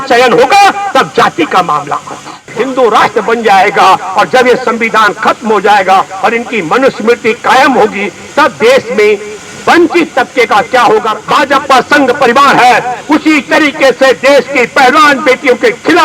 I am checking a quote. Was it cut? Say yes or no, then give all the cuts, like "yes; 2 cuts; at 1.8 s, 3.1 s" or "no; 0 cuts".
yes; 2 cuts; at 2.5 s, 11.2 s